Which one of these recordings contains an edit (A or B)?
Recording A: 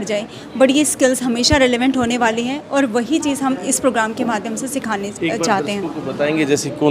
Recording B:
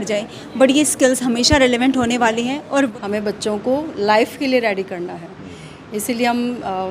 B